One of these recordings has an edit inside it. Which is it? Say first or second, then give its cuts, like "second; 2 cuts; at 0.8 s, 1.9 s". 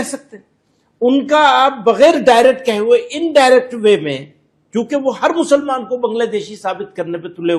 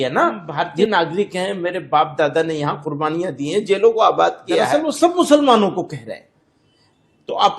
second; 2 cuts; at 0.9 s, 4.8 s